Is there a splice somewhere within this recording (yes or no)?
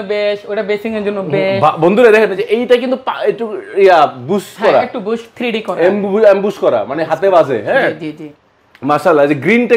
no